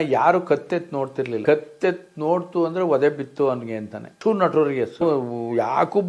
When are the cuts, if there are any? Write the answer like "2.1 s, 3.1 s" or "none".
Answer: none

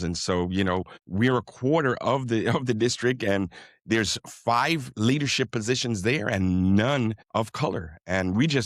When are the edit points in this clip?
1.0 s, 7.2 s

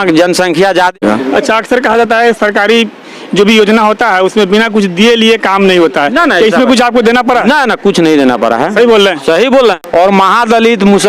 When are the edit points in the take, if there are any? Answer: 0.9 s, 9.8 s

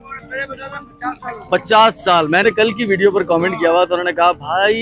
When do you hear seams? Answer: 2.4 s

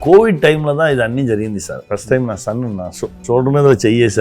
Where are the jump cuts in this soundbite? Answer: 1.8 s, 3.2 s

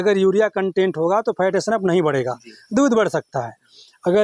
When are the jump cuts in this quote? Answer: none

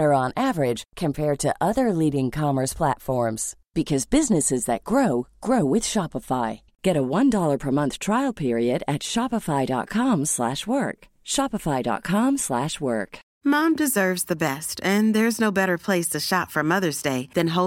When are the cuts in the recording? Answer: 13.2 s

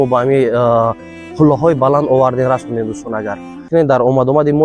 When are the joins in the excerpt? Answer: 3.7 s

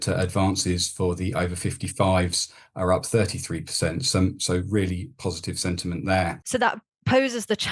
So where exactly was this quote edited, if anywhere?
6.4 s

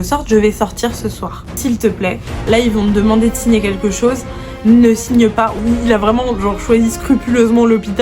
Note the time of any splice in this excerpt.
1.5 s, 5.6 s

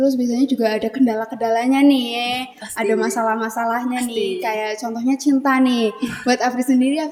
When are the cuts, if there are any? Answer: none

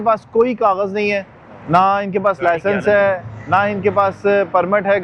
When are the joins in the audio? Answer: none

